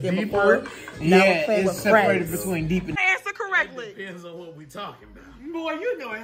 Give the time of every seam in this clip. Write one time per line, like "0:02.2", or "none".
0:03.0